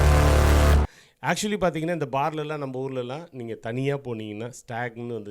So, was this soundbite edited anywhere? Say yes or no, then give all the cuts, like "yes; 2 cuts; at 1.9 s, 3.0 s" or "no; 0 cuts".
no; 0 cuts